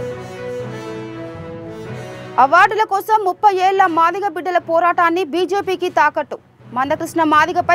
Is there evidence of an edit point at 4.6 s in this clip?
no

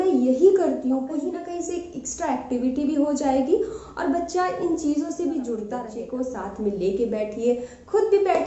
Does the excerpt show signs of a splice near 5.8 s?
yes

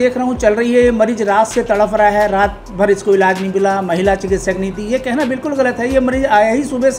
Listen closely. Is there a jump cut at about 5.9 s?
no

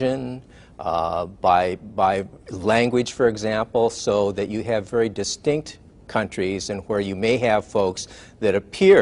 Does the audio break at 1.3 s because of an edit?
yes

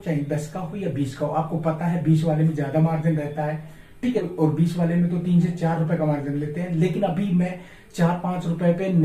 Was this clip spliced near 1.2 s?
no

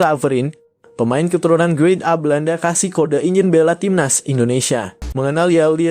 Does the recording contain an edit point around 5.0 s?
yes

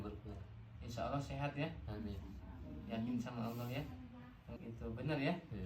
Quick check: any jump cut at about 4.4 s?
yes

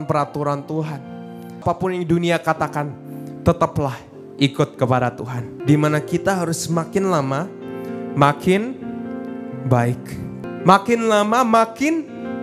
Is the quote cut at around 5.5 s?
yes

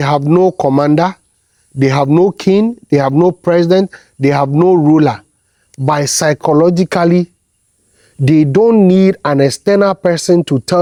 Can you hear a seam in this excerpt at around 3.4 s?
no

